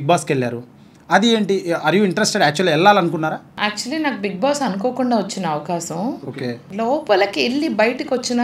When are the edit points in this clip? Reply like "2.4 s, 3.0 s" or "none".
3.5 s, 6.6 s